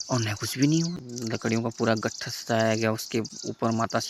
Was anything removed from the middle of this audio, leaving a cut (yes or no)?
yes